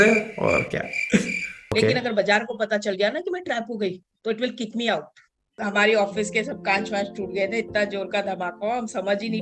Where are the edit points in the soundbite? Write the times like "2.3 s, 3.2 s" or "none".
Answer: 1.7 s, 5.6 s